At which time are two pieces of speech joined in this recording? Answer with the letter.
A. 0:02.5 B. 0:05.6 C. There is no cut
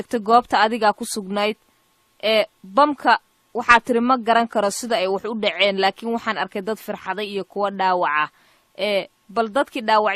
B